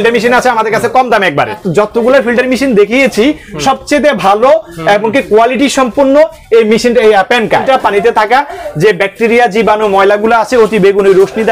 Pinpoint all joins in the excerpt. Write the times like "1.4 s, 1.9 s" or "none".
1.6 s, 7.6 s